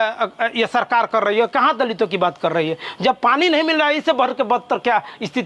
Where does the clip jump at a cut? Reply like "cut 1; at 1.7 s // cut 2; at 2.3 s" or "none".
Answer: none